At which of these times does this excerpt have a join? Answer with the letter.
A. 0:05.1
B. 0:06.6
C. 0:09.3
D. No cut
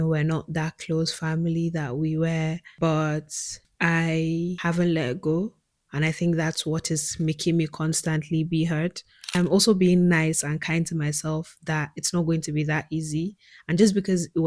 C